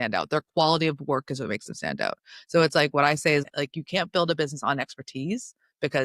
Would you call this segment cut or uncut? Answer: cut